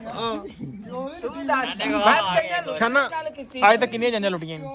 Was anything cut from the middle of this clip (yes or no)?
no